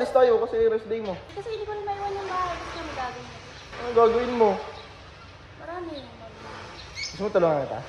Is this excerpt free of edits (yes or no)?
no